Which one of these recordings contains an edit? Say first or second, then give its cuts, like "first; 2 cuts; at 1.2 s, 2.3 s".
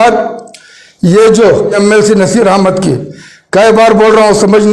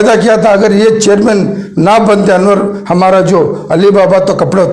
first; 1 cut; at 1.8 s